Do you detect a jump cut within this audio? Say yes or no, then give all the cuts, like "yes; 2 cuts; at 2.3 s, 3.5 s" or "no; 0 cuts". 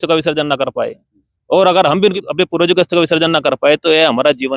yes; 1 cut; at 2.2 s